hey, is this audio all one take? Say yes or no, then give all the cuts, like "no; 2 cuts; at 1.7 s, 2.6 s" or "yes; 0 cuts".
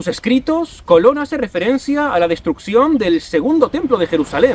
yes; 0 cuts